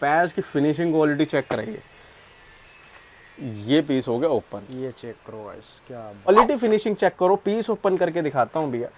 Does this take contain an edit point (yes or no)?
yes